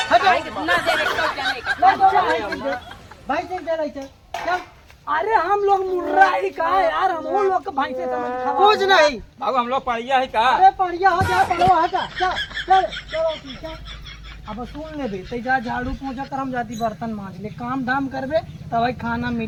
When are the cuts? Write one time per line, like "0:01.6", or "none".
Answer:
none